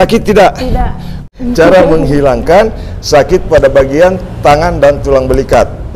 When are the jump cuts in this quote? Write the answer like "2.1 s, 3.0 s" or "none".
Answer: 1.2 s